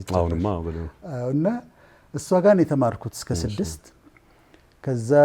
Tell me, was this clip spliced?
no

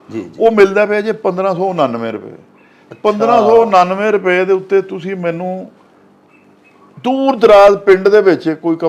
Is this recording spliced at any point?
no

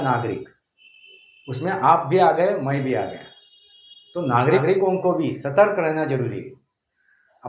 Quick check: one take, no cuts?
no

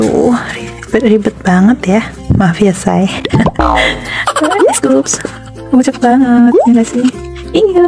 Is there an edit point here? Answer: no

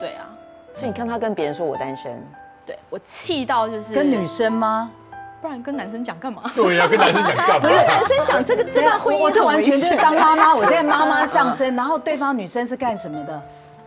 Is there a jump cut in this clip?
no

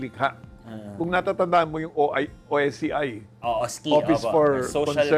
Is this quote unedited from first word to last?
yes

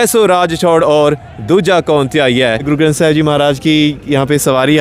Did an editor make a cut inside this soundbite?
yes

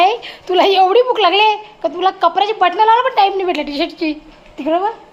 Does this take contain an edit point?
no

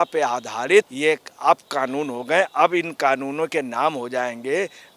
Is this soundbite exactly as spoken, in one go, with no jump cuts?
no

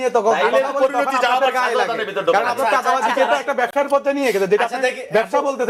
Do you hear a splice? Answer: no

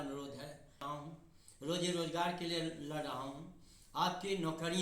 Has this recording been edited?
yes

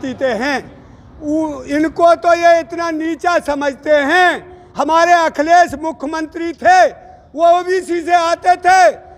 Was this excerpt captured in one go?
yes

